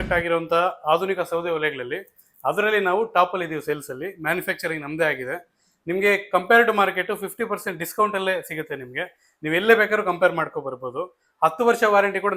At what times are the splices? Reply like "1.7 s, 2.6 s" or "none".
none